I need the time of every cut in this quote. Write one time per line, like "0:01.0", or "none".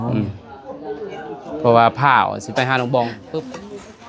0:03.2